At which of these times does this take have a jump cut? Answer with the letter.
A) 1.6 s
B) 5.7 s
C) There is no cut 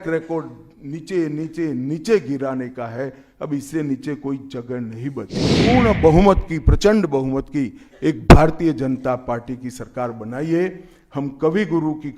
B